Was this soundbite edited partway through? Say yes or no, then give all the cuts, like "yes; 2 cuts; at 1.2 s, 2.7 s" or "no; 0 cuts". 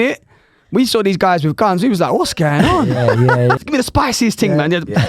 yes; 1 cut; at 3.6 s